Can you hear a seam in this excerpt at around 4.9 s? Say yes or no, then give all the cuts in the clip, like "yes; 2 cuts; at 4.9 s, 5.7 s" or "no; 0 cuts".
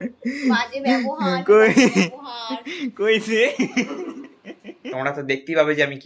yes; 1 cut; at 4.9 s